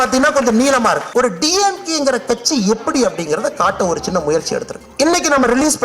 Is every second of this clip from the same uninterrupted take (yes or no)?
no